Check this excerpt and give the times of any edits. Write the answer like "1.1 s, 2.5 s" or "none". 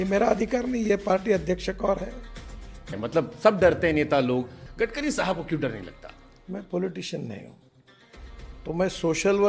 2.9 s, 4.6 s